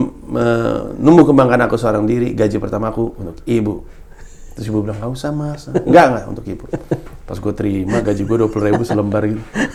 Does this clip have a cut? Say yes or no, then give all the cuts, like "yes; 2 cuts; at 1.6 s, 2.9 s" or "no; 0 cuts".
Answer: no; 0 cuts